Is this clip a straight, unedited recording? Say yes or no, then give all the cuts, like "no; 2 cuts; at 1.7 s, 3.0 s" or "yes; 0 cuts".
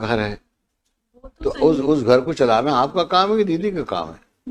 yes; 0 cuts